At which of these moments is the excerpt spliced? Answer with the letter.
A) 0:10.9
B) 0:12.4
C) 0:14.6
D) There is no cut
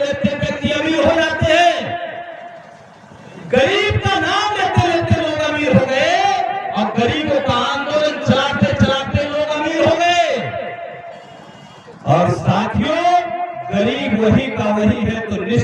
D